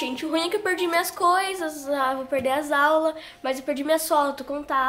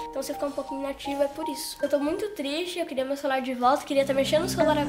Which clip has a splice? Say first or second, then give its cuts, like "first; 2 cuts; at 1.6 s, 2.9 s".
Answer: second; 1 cut; at 1.8 s